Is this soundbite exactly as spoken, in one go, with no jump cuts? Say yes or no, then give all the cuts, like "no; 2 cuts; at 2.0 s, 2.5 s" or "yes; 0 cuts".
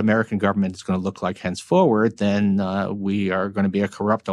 yes; 0 cuts